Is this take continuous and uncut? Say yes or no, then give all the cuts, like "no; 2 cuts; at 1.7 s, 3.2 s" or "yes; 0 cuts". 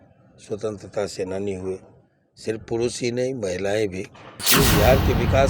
no; 1 cut; at 4.5 s